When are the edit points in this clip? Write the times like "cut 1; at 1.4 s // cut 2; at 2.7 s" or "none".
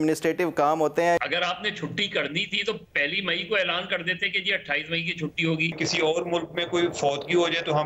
cut 1; at 1.2 s // cut 2; at 5.8 s